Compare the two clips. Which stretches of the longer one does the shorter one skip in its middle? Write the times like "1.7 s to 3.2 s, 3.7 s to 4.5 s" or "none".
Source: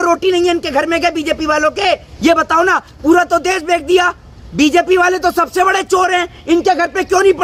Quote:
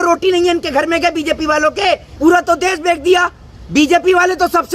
2.1 s to 2.9 s